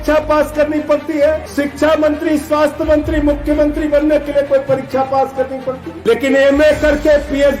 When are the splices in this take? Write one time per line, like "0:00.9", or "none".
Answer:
0:01.4
0:05.9